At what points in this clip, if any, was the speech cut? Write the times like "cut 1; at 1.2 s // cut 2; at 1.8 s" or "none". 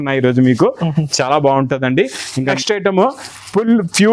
cut 1; at 2.6 s